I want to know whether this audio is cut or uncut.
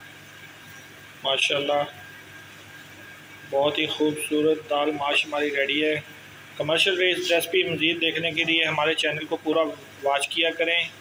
uncut